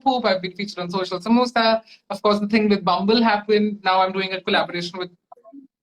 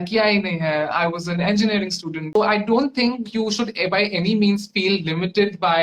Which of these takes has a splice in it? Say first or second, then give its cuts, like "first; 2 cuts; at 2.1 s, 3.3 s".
second; 1 cut; at 2.2 s